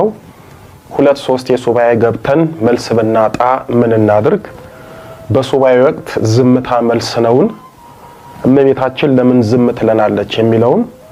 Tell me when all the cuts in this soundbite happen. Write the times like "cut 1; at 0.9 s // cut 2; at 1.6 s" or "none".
none

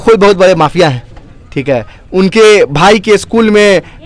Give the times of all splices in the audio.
none

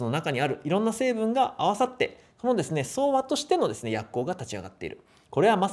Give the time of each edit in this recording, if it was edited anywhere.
none

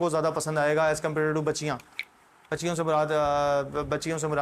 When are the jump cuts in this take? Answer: none

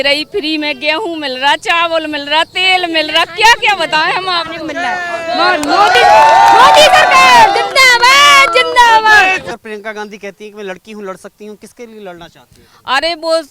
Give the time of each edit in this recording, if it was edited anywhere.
cut 1; at 9.5 s

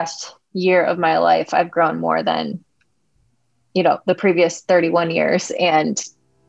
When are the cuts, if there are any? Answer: none

